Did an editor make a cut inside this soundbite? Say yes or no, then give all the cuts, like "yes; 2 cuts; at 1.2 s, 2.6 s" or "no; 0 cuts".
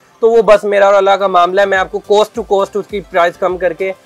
no; 0 cuts